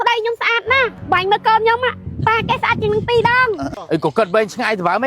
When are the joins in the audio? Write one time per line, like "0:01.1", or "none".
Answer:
0:03.8